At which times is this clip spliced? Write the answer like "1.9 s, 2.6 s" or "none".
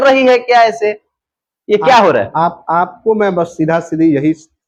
none